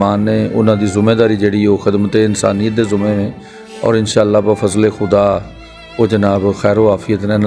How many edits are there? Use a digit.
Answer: 0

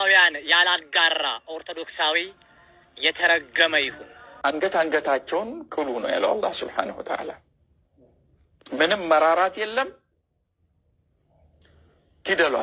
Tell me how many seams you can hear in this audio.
1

